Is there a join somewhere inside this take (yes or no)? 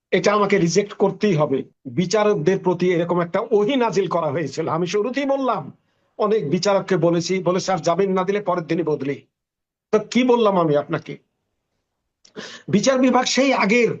yes